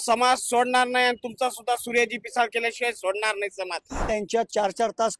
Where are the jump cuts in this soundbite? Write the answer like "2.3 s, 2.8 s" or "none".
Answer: 4.0 s